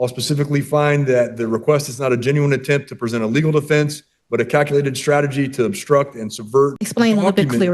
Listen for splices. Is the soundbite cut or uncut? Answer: cut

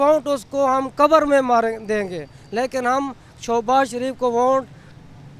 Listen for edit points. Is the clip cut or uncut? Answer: uncut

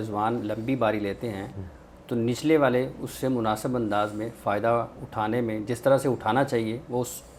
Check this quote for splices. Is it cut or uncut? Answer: uncut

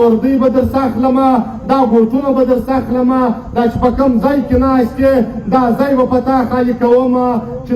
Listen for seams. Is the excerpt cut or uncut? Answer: uncut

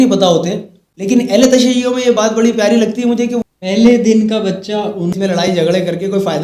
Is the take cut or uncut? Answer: cut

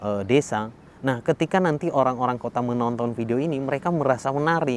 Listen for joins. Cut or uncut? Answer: uncut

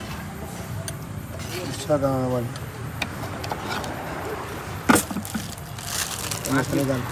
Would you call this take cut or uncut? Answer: uncut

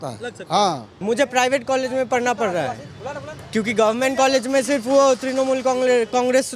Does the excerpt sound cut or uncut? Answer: cut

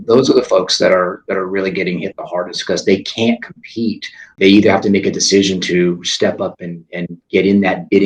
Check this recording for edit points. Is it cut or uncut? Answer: cut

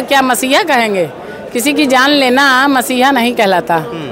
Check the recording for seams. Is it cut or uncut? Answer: uncut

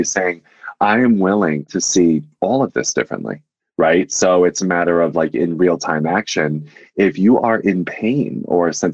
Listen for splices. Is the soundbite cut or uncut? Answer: cut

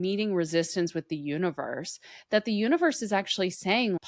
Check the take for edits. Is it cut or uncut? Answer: uncut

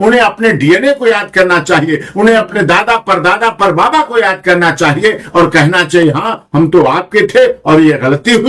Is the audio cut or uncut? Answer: uncut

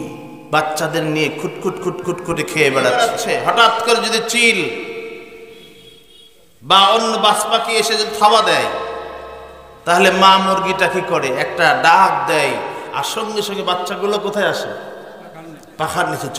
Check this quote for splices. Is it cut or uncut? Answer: cut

